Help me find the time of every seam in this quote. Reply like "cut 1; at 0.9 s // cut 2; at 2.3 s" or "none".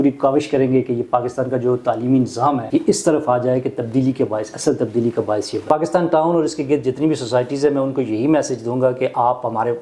cut 1; at 2.6 s // cut 2; at 5.7 s